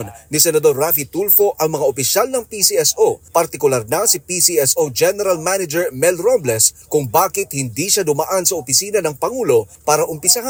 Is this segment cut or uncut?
uncut